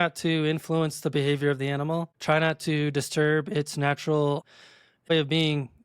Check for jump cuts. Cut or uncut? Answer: cut